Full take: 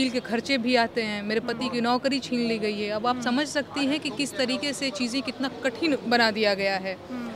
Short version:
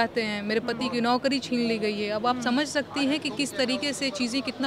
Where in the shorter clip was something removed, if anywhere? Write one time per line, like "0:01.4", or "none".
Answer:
none